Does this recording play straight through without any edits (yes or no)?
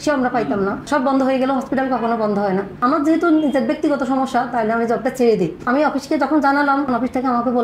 no